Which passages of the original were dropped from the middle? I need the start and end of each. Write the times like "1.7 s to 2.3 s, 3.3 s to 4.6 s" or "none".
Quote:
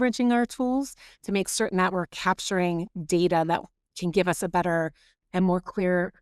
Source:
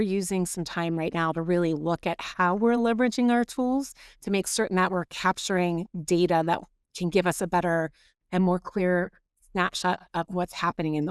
none